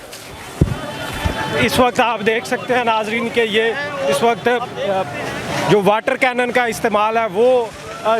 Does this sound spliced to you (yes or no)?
no